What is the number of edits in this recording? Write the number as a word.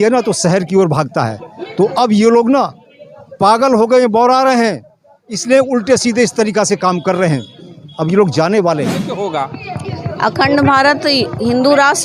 one